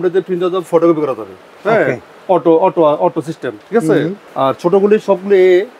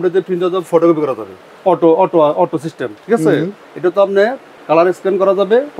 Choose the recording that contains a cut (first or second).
second